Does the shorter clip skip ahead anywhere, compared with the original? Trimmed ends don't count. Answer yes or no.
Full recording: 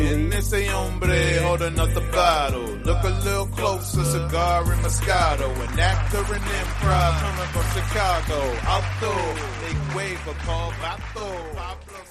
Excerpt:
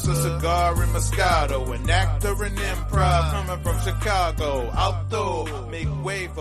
no